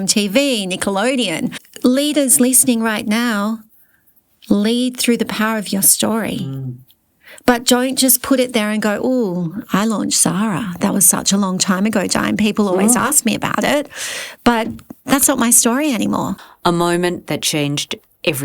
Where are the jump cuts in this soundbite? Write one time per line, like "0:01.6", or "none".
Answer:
0:01.6
0:16.4